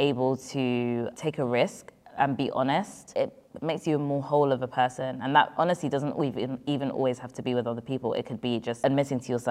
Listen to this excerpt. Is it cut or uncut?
cut